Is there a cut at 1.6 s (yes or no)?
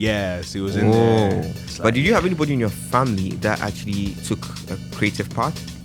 yes